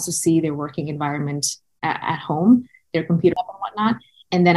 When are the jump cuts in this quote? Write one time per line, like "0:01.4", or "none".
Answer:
0:03.1